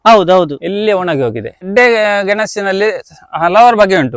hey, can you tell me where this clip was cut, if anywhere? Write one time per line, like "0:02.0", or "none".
0:01.7